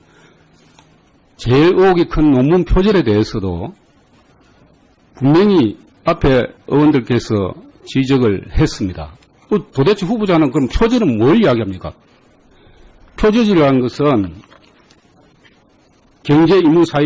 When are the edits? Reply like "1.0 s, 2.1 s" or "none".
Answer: 13.6 s